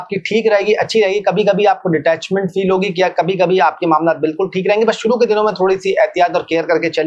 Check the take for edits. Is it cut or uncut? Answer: uncut